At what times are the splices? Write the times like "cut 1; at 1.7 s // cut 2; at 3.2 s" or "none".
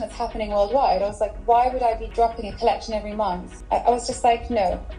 cut 1; at 2.0 s // cut 2; at 3.5 s